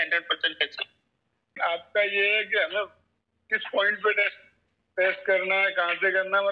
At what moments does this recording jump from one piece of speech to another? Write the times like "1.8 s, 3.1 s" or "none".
1.6 s